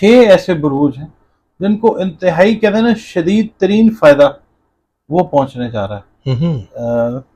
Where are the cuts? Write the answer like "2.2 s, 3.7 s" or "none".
none